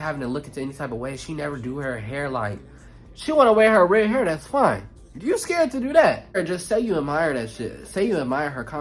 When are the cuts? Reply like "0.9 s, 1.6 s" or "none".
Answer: none